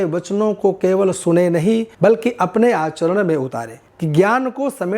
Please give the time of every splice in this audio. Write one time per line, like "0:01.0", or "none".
0:03.8